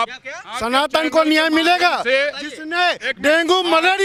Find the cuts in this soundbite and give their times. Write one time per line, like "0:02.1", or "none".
none